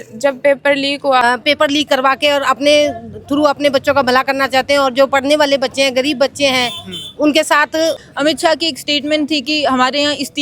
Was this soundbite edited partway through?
yes; 2 cuts; at 1.2 s, 8.1 s

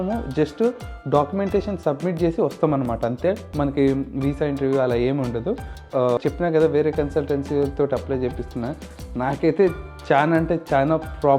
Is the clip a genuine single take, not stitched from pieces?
no; 1 cut; at 6.1 s

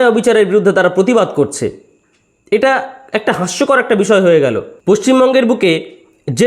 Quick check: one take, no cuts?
no; 1 cut; at 4.7 s

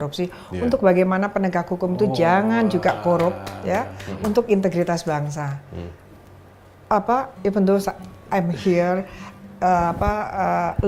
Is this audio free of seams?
yes; 0 cuts

